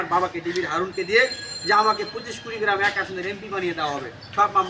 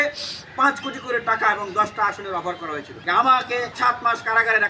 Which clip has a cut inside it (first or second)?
second